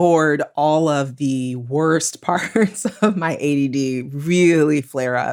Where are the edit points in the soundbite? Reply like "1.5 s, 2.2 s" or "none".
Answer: none

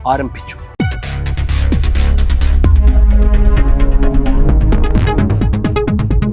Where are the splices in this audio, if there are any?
none

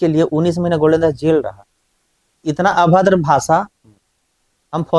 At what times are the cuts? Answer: 2.3 s

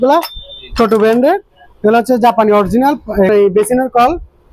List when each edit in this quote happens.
3.3 s

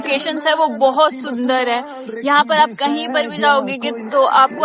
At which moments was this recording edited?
none

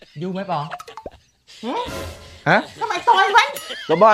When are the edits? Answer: none

